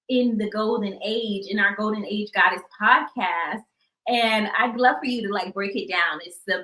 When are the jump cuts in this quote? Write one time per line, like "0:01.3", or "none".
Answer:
none